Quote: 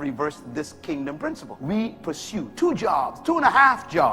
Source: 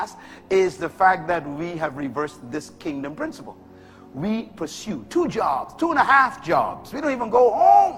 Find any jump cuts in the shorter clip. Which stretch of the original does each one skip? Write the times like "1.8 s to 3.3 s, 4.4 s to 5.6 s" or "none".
3.5 s to 4.0 s